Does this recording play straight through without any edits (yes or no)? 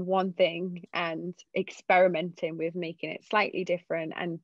no